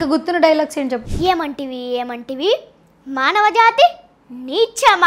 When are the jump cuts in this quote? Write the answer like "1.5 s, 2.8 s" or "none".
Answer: 1.1 s